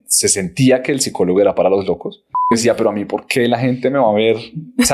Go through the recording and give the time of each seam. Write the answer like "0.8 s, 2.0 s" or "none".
2.5 s

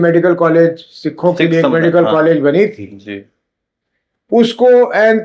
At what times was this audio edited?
none

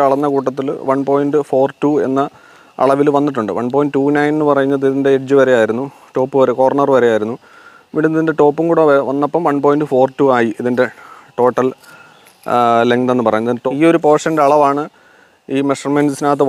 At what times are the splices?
13.6 s

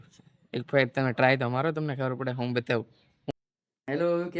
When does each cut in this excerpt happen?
3.3 s

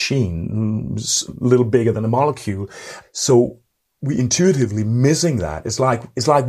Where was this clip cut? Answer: 3.0 s

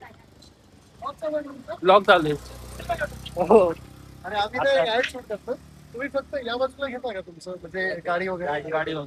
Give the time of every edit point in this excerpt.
none

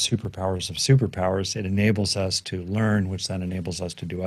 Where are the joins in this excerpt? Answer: none

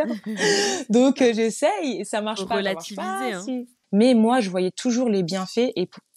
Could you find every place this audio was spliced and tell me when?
3.7 s

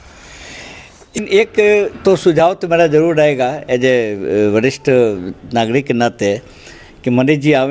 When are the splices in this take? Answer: 1.2 s

